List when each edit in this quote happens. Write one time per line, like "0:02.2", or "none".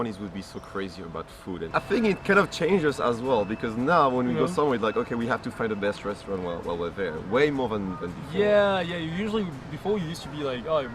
0:01.7

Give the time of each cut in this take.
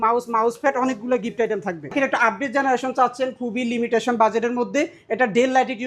0:01.9

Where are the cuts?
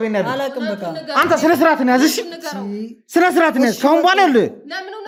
none

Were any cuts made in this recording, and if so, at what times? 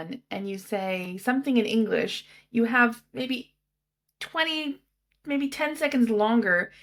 none

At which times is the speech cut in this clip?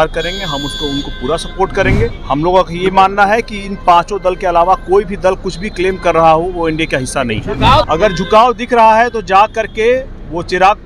0:02.2
0:07.9

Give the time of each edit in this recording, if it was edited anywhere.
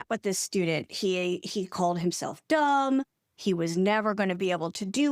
none

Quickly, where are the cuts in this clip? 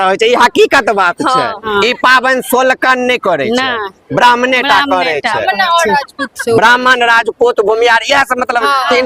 0:01.7

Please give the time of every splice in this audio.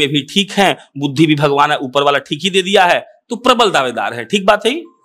none

